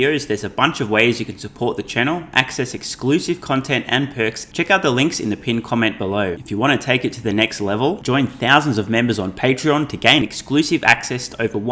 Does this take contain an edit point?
yes; 2 cuts; at 4.4 s, 6.4 s

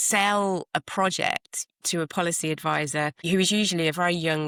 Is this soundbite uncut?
yes; 0 cuts

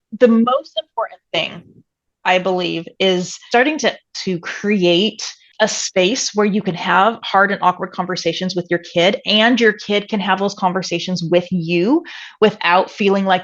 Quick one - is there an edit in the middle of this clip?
yes; 1 cut; at 3.4 s

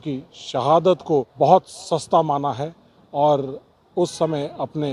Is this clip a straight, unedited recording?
no; 1 cut; at 1.3 s

